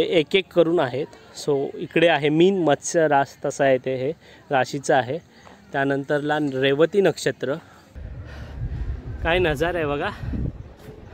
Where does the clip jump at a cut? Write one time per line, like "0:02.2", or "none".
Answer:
0:08.0